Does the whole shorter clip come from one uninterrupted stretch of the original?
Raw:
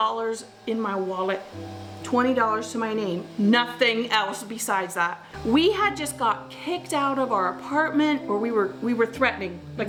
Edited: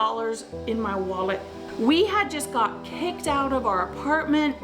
no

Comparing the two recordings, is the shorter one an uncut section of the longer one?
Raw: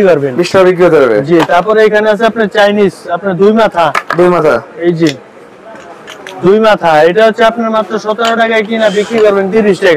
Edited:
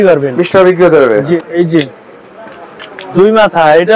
no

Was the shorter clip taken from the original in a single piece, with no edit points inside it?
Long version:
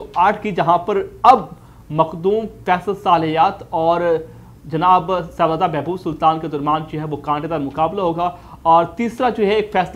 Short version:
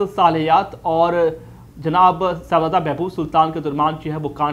yes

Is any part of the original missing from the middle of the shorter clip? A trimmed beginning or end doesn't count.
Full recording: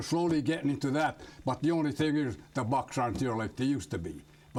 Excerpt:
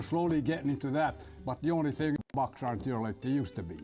yes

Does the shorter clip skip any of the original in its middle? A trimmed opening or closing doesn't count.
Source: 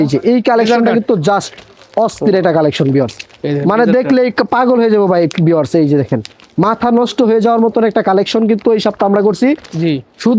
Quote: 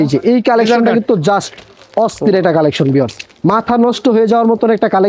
yes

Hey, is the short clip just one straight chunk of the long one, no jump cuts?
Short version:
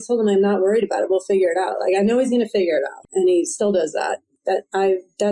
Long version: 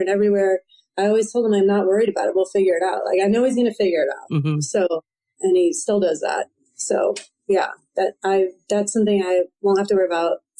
no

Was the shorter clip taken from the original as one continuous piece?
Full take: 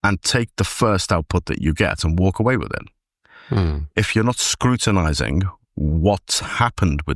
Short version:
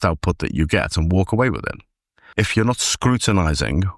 no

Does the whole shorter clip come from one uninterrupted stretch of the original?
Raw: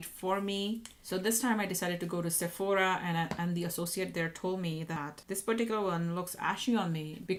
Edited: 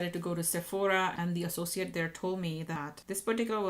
no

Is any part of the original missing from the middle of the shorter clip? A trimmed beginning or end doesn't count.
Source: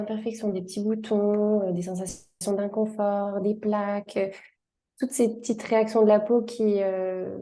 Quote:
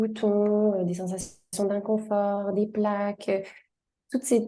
no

